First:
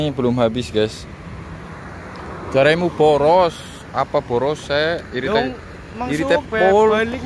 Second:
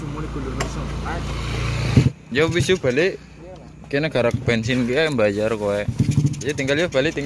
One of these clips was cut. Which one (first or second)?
second